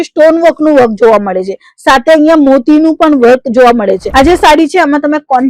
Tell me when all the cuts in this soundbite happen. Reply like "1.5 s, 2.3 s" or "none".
4.0 s